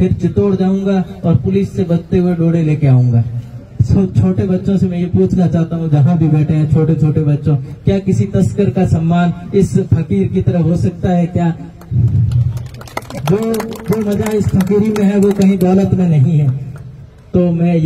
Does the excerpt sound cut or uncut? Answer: uncut